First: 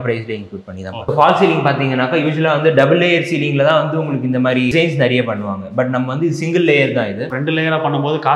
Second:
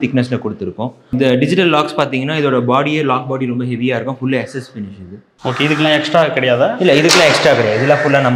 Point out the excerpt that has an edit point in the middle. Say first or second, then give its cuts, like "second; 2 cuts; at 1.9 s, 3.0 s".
first; 3 cuts; at 1.1 s, 4.7 s, 7.3 s